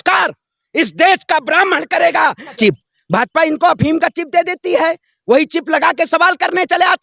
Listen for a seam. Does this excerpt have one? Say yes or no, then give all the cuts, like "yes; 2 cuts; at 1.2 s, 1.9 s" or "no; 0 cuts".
yes; 1 cut; at 2.6 s